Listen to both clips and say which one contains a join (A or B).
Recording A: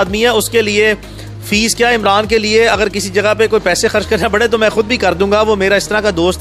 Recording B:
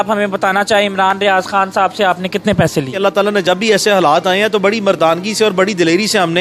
B